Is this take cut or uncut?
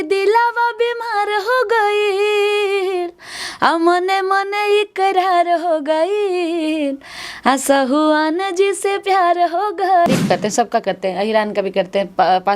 cut